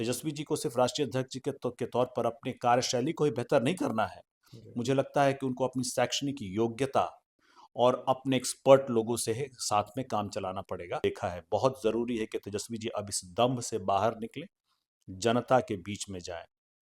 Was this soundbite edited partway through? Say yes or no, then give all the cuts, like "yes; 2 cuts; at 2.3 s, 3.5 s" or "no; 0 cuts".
yes; 1 cut; at 11.0 s